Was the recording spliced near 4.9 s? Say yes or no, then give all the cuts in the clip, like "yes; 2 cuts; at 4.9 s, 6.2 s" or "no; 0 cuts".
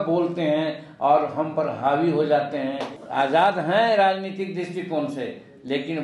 no; 1 cut; at 2.9 s